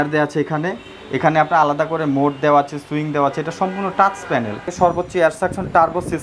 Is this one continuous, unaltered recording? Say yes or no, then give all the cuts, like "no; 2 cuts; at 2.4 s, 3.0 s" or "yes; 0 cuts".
no; 1 cut; at 4.7 s